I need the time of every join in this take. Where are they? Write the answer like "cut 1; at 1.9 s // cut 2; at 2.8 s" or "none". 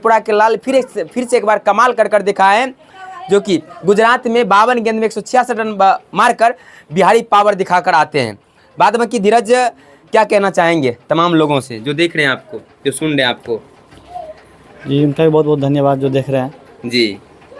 none